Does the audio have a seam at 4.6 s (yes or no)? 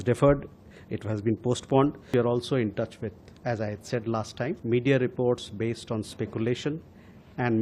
yes